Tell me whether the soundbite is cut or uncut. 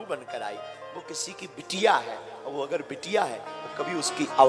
uncut